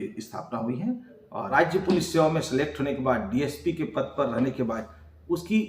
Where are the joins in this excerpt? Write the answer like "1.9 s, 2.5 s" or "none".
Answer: 1.5 s